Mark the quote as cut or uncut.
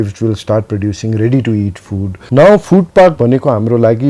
cut